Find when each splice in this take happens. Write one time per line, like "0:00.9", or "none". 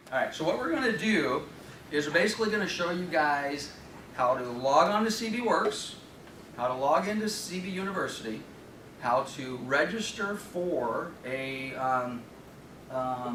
none